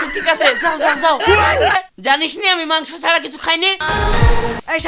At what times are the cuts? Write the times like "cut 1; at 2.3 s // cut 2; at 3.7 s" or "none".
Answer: cut 1; at 1.8 s // cut 2; at 3.8 s